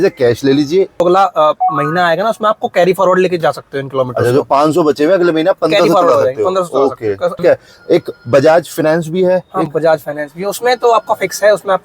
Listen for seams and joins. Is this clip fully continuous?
no; 2 cuts; at 1.0 s, 7.3 s

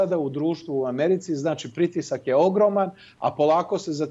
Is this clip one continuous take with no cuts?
yes; 0 cuts

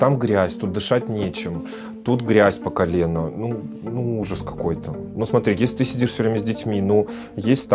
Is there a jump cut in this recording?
no; 0 cuts

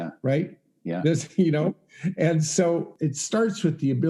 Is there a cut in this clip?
yes; 1 cut; at 2.9 s

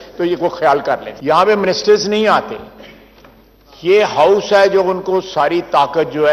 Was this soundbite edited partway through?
yes; 1 cut; at 1.1 s

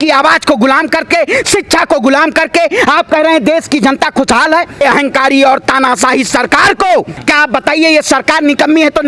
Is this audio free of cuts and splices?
no; 2 cuts; at 4.8 s, 7.2 s

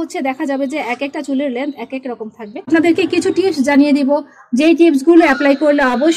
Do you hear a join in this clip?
yes; 1 cut; at 2.7 s

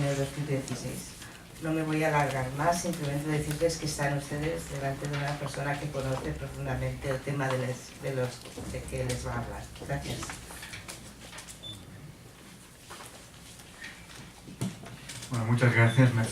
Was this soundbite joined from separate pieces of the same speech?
no; 0 cuts

